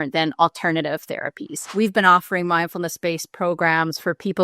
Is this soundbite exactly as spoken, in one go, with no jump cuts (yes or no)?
no